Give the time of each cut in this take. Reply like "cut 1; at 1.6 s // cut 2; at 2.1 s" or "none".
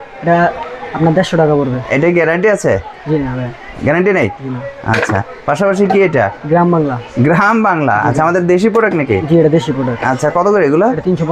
none